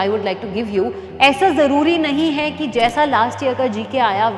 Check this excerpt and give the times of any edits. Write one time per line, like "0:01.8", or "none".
none